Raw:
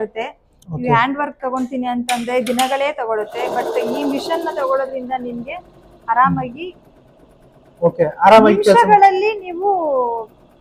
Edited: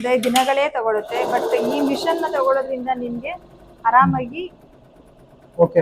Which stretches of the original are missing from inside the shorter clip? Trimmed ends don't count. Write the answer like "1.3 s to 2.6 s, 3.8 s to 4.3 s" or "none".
none